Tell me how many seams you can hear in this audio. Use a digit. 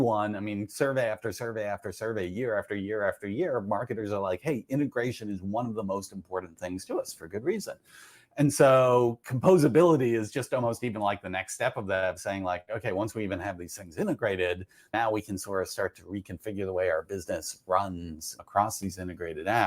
2